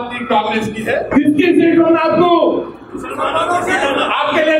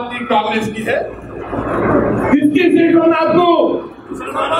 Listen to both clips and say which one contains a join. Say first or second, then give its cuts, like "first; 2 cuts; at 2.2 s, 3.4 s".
first; 1 cut; at 1.1 s